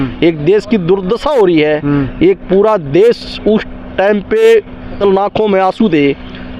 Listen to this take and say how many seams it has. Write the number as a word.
one